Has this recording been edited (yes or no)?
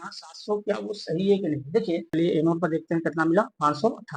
yes